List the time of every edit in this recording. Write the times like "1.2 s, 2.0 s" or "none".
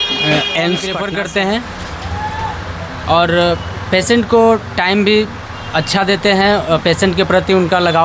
0.9 s